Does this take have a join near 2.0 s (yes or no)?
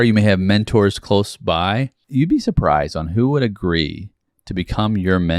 yes